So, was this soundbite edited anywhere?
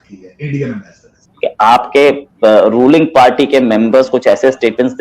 yes; 1 cut; at 1.3 s

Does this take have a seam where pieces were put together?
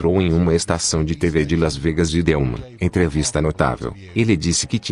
yes; 1 cut; at 2.6 s

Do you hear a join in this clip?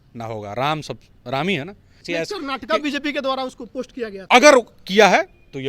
yes; 2 cuts; at 2.0 s, 4.2 s

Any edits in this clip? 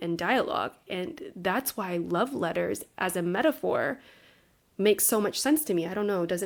no; 0 cuts

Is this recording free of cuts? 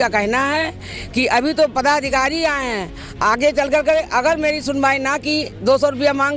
yes; 0 cuts

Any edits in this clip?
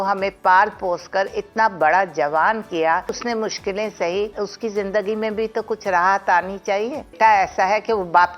yes; 3 cuts; at 3.2 s, 4.3 s, 7.1 s

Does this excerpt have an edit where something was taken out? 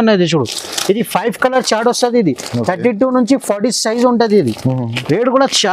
no; 0 cuts

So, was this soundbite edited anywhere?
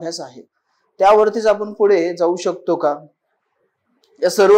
no; 0 cuts

